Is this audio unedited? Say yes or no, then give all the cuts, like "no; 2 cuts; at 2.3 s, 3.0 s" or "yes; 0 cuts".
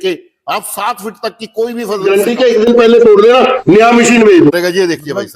no; 2 cuts; at 2.0 s, 4.5 s